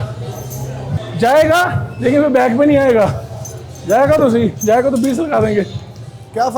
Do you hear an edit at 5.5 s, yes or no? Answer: no